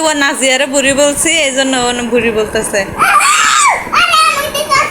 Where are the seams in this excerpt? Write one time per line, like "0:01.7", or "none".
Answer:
none